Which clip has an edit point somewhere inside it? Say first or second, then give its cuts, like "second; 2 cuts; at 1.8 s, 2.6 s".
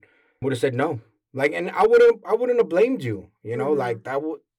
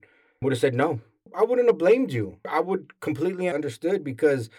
second; 3 cuts; at 1.3 s, 2.5 s, 3.5 s